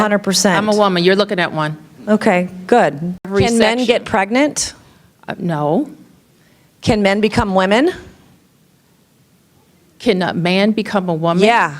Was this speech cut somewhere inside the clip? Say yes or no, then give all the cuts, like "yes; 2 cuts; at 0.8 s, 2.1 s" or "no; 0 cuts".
yes; 1 cut; at 3.3 s